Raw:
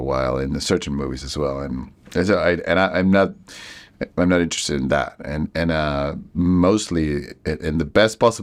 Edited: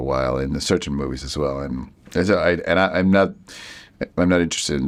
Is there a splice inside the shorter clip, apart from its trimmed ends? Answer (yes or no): no